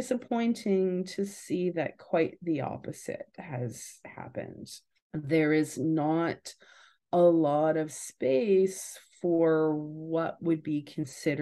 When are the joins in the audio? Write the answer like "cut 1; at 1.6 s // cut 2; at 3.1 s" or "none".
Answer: none